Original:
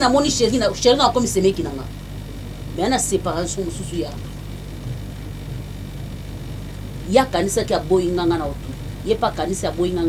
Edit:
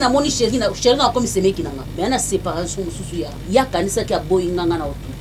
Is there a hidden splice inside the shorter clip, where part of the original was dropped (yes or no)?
yes